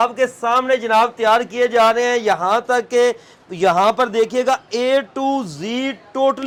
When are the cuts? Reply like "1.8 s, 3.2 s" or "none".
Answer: none